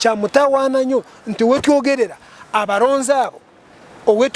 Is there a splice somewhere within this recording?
no; 0 cuts

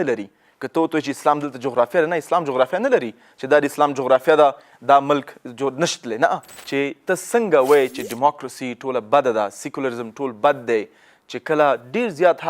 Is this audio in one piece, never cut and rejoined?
no; 1 cut; at 6.5 s

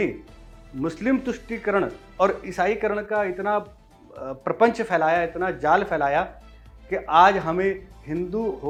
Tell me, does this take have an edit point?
no; 0 cuts

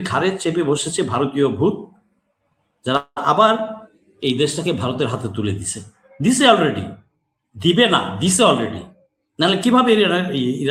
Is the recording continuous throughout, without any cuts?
yes; 0 cuts

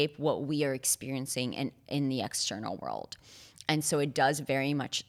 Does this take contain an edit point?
no; 0 cuts

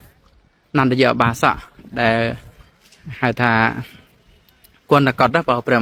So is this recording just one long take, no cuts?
yes; 0 cuts

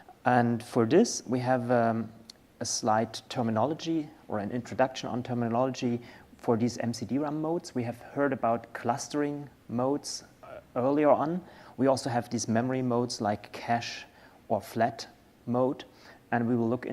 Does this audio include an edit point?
yes; 1 cut; at 5.4 s

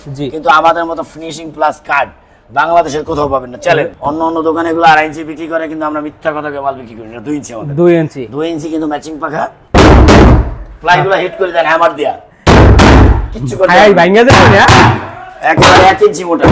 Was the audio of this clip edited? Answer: yes; 2 cuts; at 3.9 s, 9.6 s

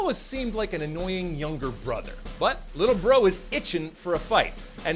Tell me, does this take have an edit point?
yes; 1 cut; at 2.2 s

